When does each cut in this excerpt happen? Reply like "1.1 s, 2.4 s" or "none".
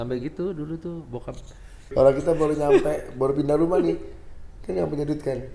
1.9 s